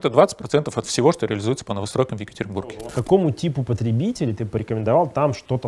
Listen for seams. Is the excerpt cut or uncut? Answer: cut